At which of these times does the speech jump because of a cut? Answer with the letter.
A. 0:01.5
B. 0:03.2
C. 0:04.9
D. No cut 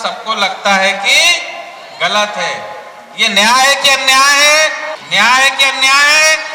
C